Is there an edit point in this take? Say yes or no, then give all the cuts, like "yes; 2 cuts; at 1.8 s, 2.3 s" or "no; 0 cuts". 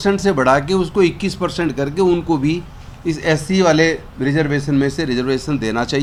no; 0 cuts